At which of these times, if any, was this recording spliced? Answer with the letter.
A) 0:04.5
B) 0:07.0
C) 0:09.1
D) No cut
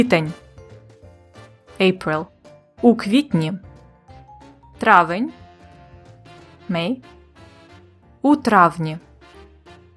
C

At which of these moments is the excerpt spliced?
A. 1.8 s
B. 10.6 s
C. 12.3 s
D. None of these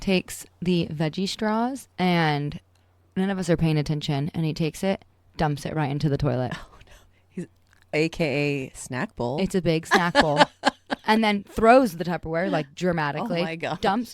A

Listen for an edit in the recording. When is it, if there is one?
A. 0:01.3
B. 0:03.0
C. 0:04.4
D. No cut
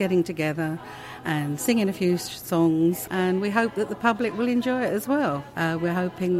B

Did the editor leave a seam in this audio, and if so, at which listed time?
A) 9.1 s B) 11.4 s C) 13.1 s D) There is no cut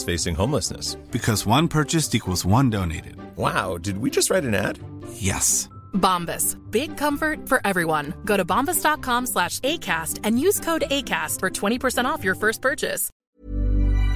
C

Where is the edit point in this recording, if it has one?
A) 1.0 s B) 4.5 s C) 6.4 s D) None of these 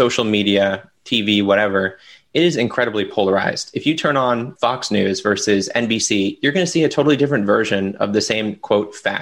B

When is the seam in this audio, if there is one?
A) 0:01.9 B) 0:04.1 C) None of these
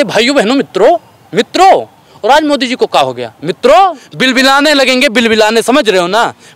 B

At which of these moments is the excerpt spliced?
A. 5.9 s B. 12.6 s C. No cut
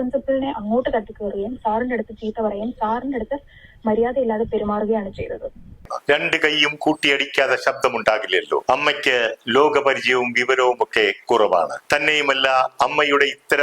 A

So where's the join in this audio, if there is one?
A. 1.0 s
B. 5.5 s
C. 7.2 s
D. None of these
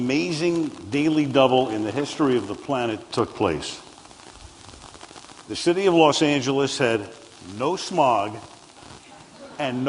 B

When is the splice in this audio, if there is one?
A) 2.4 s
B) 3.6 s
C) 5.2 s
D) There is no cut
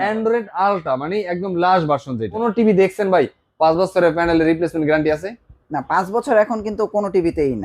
A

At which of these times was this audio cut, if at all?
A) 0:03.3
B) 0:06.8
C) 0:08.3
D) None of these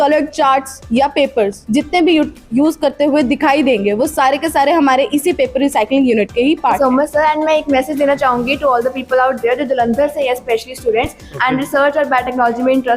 B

